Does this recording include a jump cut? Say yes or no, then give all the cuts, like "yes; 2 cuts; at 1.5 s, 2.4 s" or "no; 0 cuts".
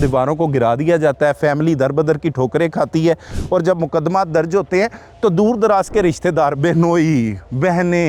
no; 0 cuts